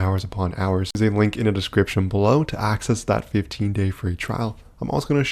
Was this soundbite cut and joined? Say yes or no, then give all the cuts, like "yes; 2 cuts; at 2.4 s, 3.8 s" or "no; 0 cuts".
yes; 1 cut; at 1.0 s